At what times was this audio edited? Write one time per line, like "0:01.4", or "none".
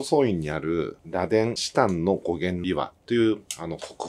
none